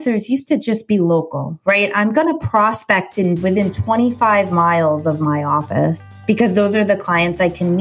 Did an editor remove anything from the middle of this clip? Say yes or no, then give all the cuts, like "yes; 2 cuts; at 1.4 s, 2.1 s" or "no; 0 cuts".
no; 0 cuts